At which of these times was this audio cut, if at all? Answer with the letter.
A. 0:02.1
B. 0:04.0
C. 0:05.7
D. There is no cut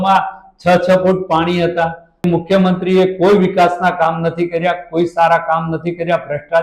A